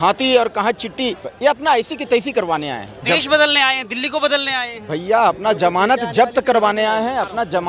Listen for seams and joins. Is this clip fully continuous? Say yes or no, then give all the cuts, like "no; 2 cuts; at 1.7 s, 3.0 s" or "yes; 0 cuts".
no; 2 cuts; at 1.3 s, 3.1 s